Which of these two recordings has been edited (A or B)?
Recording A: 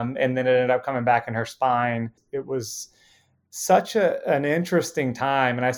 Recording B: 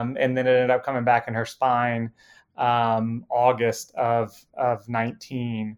A